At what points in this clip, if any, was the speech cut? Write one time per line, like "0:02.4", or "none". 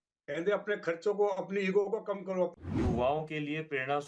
0:02.5